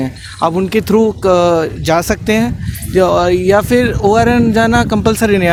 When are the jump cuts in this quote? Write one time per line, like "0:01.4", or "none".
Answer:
none